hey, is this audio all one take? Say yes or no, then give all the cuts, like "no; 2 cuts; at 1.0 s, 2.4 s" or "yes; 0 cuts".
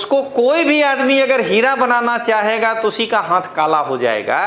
yes; 0 cuts